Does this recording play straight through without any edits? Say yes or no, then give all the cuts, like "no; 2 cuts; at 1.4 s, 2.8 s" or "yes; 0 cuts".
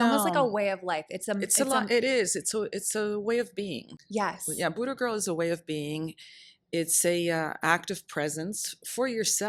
yes; 0 cuts